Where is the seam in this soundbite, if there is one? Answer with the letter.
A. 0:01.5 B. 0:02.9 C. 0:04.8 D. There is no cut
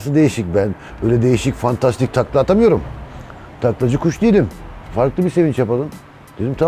C